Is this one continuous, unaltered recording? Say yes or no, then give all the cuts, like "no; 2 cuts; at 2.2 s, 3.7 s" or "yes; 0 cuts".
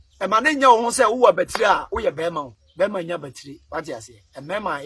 no; 1 cut; at 2.6 s